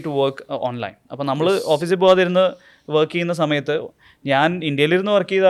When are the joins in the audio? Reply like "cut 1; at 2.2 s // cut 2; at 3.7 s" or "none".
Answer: none